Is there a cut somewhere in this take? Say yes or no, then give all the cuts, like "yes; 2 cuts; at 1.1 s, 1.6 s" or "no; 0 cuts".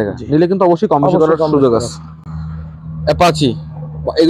no; 0 cuts